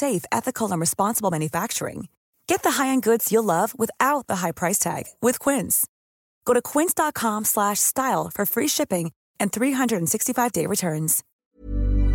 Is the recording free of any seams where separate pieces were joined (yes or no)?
no